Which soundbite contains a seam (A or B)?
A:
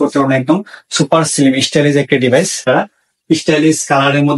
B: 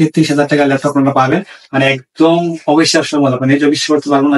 A